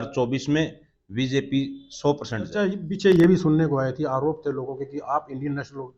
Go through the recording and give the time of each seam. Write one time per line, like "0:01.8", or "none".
0:02.8